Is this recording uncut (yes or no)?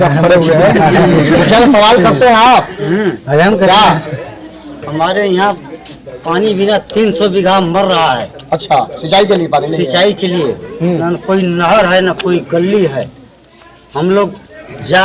yes